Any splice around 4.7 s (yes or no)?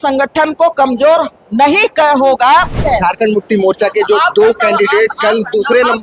no